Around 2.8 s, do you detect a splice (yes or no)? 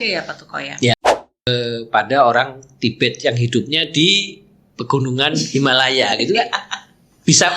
no